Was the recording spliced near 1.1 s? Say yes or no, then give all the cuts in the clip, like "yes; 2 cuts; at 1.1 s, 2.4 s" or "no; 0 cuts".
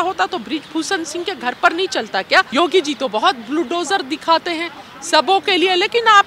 no; 1 cut; at 2.5 s